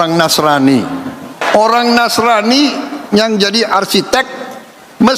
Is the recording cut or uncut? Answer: cut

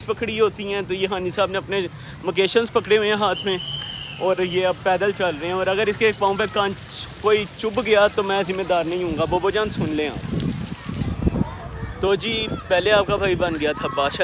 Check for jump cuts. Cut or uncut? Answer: cut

